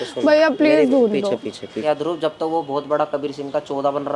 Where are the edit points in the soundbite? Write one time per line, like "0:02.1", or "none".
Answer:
0:01.8